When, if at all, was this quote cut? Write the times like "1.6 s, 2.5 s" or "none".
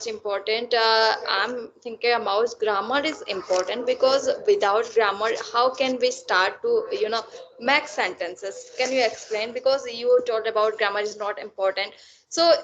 none